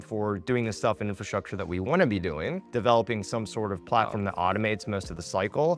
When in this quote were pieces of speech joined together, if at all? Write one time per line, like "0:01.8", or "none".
0:02.7